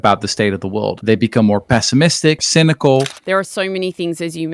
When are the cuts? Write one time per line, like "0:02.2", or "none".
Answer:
0:01.0
0:02.4
0:03.2